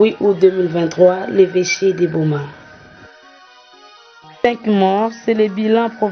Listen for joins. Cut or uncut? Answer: cut